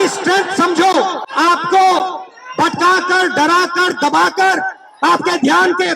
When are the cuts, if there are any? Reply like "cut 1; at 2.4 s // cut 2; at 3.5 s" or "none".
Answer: cut 1; at 1.2 s